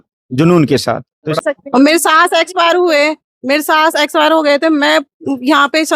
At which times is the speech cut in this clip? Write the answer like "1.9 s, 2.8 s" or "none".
1.4 s